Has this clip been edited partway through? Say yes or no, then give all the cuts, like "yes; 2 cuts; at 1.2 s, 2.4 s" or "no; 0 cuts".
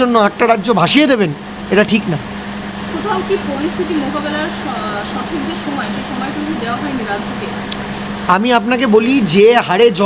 no; 0 cuts